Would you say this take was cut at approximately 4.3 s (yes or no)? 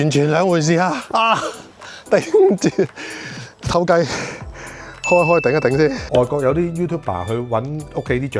no